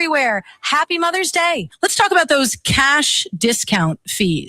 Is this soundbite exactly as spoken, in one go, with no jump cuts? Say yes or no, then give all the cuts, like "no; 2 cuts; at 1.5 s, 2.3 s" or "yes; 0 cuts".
no; 1 cut; at 1.7 s